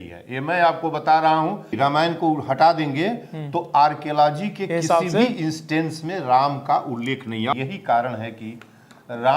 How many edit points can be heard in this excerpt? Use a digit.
2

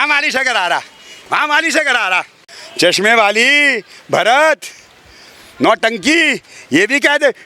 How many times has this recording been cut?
1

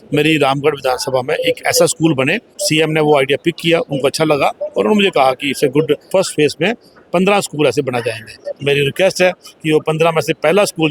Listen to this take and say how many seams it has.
3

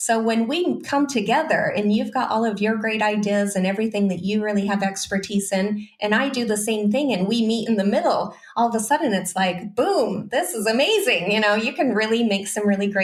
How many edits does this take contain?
0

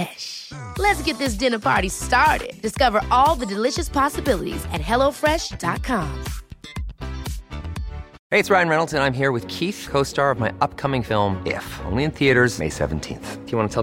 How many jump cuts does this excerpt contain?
1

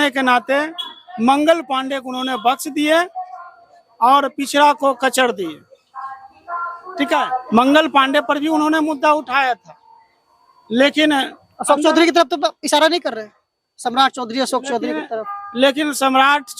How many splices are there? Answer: 1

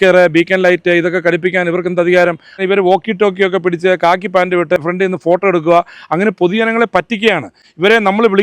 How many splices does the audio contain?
2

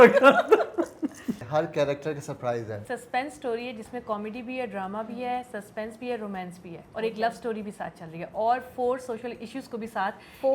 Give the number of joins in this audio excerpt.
2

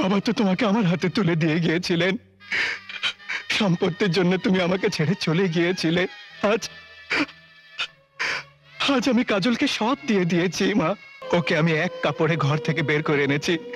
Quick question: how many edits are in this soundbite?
1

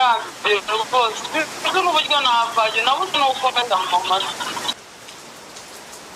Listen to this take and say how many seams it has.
1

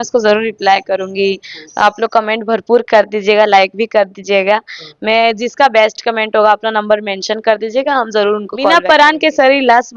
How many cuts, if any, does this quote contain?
1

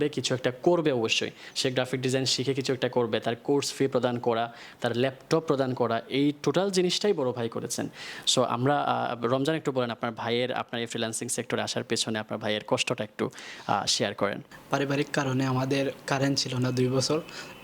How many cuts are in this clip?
1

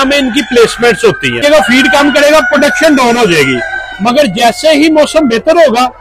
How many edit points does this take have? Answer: 1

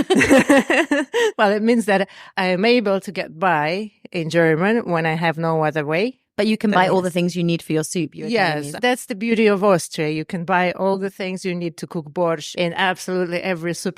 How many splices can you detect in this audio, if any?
4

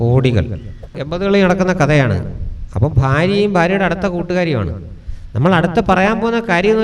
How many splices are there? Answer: 1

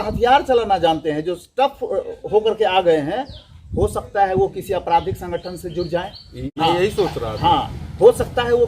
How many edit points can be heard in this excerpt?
1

